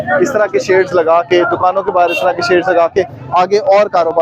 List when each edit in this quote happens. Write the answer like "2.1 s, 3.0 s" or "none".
none